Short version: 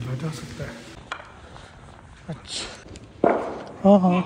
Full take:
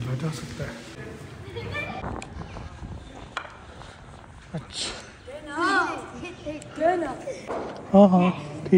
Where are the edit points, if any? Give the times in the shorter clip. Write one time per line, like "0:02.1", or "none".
0:00.9
0:03.2